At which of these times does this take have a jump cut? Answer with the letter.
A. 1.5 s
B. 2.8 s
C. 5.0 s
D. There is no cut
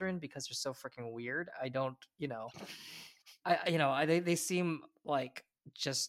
D